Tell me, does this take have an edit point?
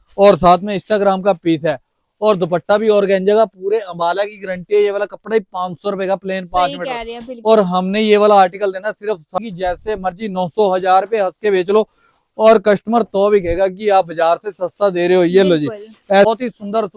yes; 2 cuts; at 9.4 s, 16.3 s

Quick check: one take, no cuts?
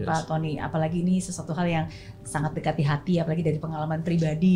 yes; 0 cuts

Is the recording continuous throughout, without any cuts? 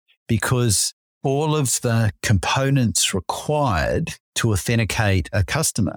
no; 1 cut; at 4.2 s

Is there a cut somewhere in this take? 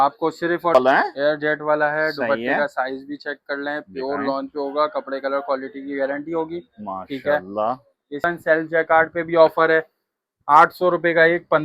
yes; 2 cuts; at 0.7 s, 8.2 s

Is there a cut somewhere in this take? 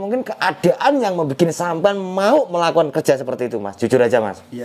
no; 0 cuts

